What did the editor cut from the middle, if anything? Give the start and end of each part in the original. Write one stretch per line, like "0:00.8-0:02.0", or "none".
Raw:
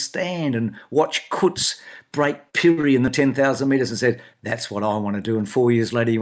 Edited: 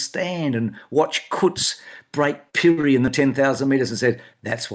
none